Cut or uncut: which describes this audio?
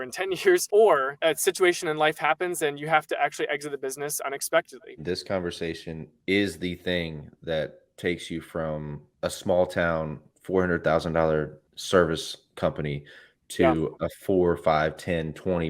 cut